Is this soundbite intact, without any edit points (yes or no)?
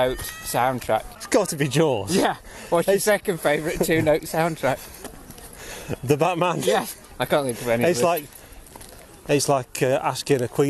no